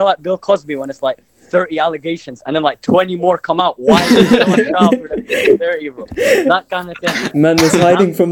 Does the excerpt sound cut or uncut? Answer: uncut